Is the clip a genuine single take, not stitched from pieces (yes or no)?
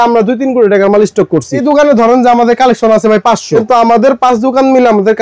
no